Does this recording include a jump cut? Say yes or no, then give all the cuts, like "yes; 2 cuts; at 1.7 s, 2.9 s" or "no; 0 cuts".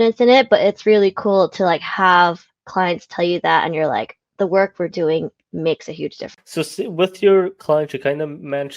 yes; 1 cut; at 6.3 s